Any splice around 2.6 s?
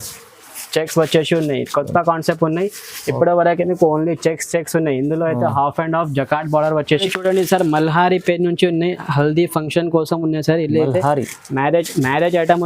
no; 1 cut; at 7.0 s

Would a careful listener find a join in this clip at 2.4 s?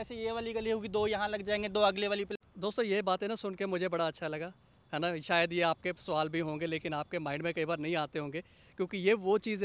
yes; 1 cut; at 2.4 s

